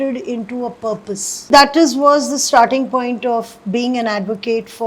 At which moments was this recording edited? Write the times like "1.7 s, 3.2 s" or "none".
1.5 s

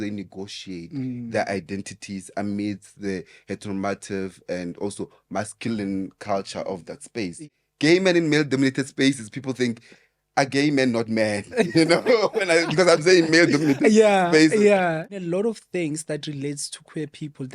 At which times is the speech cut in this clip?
7.6 s, 15.1 s

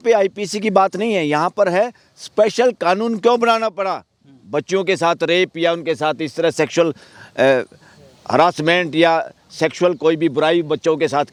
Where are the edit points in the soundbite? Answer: none

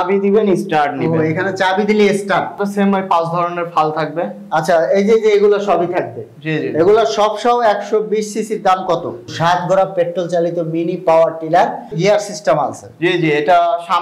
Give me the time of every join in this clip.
2.6 s, 9.3 s

